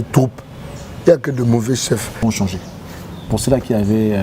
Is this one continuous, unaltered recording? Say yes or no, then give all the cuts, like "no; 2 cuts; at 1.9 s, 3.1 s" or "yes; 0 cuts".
no; 1 cut; at 2.2 s